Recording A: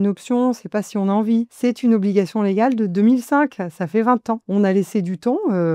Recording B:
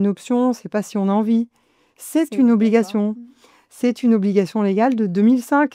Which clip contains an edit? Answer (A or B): A